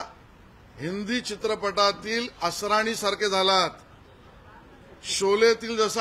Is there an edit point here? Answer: no; 0 cuts

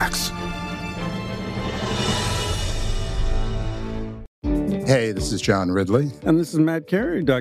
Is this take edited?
yes; 1 cut; at 4.2 s

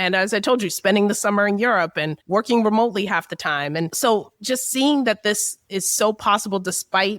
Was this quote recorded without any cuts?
no; 1 cut; at 3.9 s

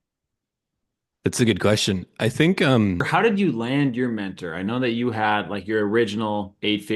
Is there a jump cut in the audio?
yes; 1 cut; at 3.1 s

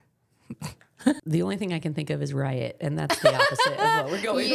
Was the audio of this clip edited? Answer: yes; 1 cut; at 1.2 s

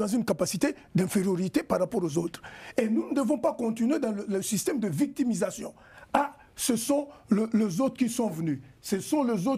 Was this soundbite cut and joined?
no; 0 cuts

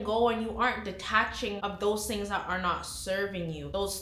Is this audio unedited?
yes; 0 cuts

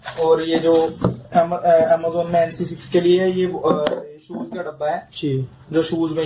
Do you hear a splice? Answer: no; 0 cuts

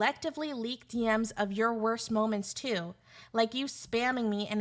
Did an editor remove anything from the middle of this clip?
no; 0 cuts

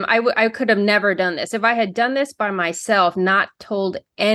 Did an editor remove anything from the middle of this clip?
no; 0 cuts

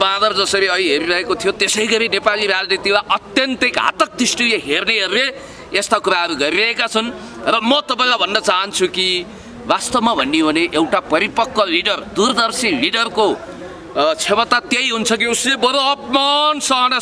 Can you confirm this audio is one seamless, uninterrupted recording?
yes; 0 cuts

